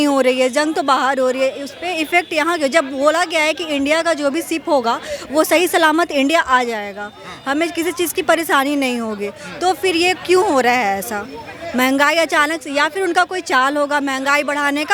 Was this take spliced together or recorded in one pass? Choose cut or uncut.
uncut